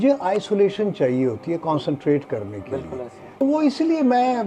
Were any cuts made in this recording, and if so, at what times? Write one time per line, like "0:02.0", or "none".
0:03.4